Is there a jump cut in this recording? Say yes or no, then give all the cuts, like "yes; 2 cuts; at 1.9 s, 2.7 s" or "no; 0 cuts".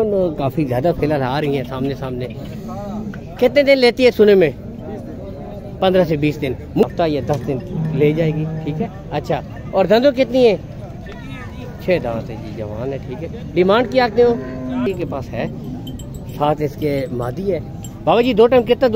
yes; 2 cuts; at 6.8 s, 14.9 s